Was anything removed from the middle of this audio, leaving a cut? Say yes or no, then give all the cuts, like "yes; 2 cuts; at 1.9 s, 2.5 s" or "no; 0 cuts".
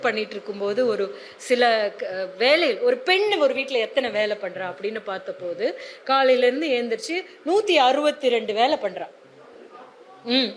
no; 0 cuts